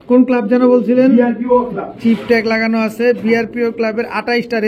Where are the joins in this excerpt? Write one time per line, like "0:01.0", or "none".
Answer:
none